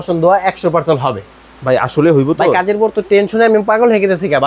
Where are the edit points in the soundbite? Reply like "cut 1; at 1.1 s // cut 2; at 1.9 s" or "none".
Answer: none